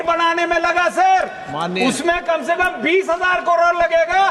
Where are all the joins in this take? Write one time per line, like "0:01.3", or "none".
none